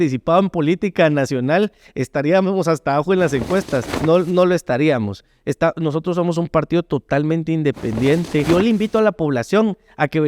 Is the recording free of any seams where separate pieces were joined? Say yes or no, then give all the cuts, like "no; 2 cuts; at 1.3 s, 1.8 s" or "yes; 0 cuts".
no; 2 cuts; at 3.9 s, 8.5 s